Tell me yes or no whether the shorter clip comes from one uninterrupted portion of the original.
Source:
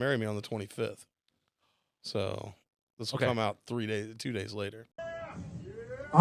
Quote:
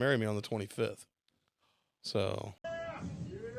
no